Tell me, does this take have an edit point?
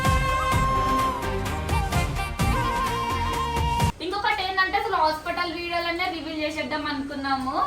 no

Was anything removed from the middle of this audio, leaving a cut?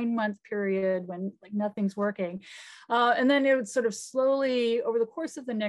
no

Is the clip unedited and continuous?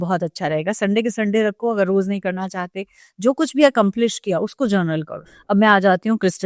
yes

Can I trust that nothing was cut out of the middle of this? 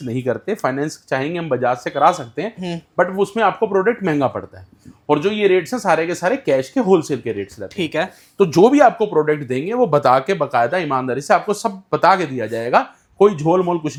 yes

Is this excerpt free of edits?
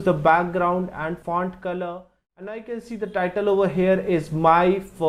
no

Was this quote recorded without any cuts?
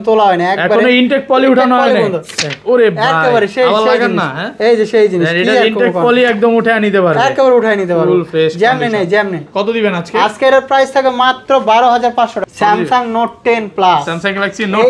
no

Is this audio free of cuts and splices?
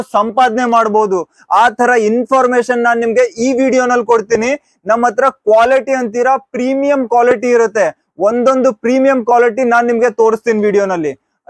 yes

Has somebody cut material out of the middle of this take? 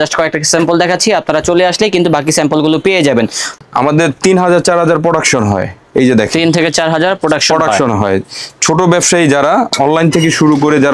yes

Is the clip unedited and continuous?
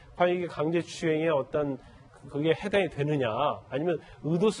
no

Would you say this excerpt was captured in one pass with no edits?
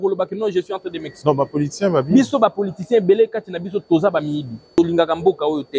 no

